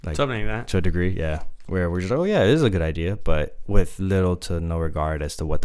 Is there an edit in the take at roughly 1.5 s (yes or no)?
yes